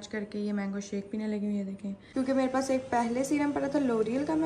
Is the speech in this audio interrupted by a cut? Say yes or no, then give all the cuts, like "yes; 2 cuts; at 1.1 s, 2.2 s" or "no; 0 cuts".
yes; 1 cut; at 2.0 s